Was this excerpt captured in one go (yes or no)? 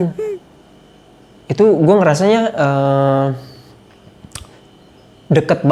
yes